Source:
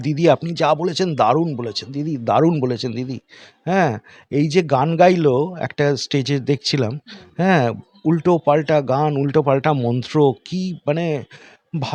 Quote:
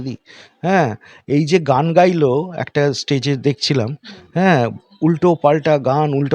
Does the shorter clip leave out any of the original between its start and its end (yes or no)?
no